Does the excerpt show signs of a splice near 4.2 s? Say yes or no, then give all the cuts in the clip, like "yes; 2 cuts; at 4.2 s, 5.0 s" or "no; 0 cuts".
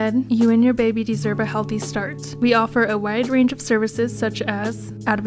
no; 1 cut; at 2.7 s